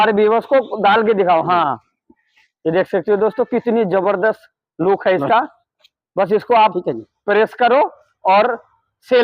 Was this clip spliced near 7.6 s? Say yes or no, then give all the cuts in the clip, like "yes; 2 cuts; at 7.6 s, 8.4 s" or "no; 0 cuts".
no; 0 cuts